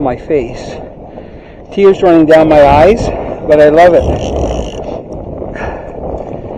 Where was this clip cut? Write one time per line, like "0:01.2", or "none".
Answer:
none